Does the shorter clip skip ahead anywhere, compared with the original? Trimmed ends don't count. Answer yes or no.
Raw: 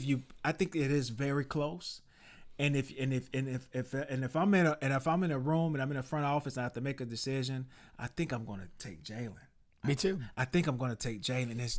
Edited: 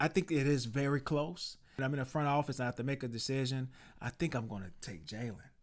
yes